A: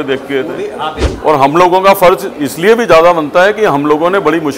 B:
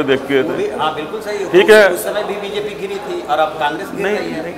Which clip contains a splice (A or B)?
A